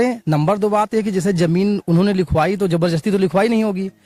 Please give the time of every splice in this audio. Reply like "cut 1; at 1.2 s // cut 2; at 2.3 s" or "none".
none